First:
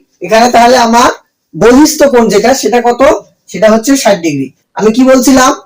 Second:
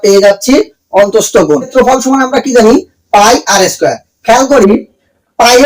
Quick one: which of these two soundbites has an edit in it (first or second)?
second